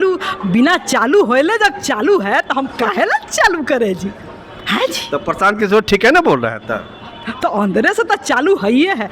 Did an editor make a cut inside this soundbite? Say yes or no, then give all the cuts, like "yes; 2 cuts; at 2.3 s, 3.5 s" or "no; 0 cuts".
no; 0 cuts